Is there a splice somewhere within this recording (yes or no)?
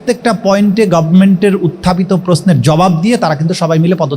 no